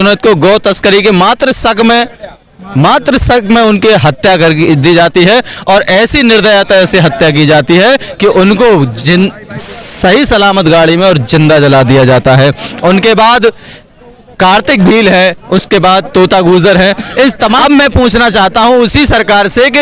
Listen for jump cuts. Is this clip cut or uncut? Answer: cut